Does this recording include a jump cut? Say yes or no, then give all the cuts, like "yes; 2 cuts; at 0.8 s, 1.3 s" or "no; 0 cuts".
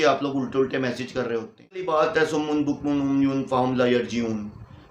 yes; 1 cut; at 1.9 s